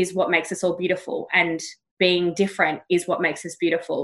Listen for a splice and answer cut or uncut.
uncut